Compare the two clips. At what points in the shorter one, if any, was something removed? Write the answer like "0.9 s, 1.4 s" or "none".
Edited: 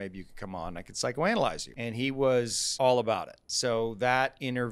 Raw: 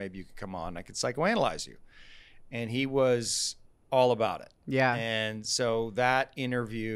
1.7 s, 2.6 s, 3.4 s